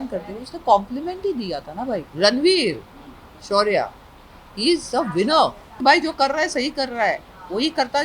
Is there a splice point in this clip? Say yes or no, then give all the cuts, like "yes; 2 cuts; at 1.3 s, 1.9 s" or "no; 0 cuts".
yes; 2 cuts; at 2.1 s, 5.7 s